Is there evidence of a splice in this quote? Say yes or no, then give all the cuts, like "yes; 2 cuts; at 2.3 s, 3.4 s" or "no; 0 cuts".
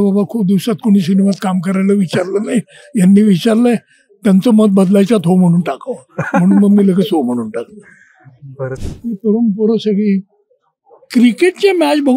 yes; 1 cut; at 8.7 s